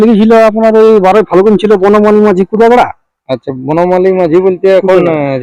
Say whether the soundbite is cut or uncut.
uncut